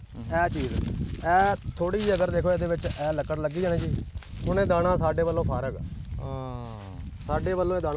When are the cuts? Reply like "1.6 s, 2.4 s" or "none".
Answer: none

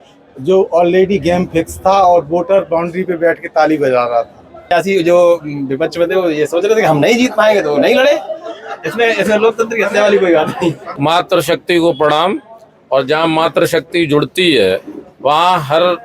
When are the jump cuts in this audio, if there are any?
4.6 s, 10.9 s

